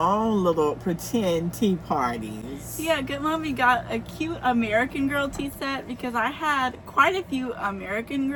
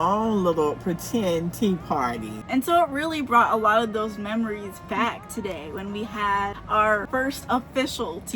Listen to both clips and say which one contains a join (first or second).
second